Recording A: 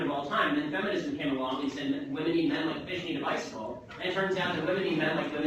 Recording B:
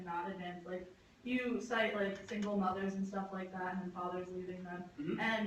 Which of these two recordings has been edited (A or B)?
B